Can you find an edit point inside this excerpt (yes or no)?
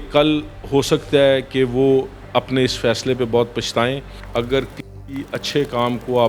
yes